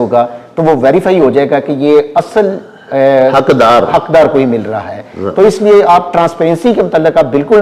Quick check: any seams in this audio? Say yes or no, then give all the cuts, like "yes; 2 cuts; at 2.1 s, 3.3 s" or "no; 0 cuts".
no; 0 cuts